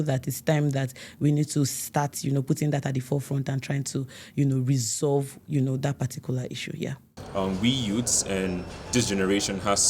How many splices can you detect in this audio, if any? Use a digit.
1